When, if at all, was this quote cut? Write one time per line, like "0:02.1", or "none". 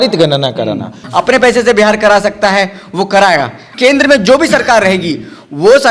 0:01.0
0:03.7